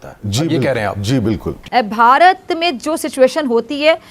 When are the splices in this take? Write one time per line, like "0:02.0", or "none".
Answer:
0:01.7